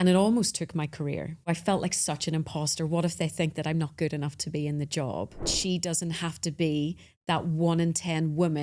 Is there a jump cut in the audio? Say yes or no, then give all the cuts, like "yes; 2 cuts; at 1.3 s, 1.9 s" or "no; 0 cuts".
yes; 2 cuts; at 1.5 s, 5.5 s